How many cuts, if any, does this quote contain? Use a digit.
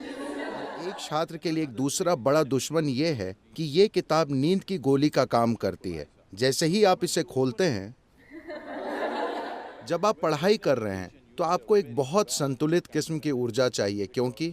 2